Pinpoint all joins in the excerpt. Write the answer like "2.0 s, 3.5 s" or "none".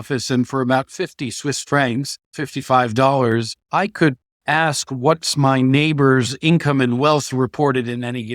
2.4 s, 3.6 s